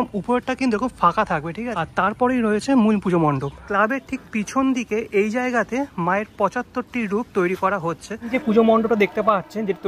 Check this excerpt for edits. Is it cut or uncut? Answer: cut